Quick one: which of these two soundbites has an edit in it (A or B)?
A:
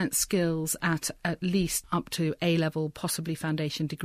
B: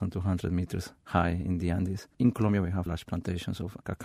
B